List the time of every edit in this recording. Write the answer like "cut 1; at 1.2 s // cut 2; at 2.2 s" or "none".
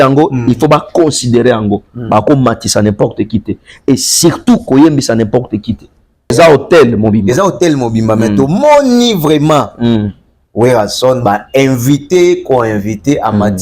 cut 1; at 6.3 s

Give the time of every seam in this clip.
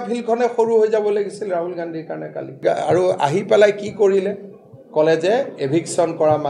cut 1; at 2.6 s

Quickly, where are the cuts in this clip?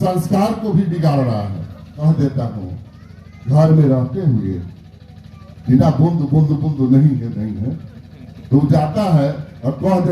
cut 1; at 2.0 s

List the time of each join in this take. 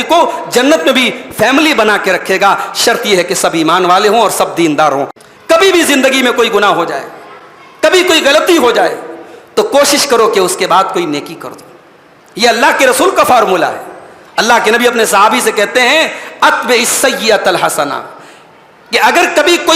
cut 1; at 5.1 s

